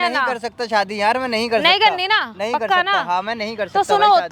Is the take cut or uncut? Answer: uncut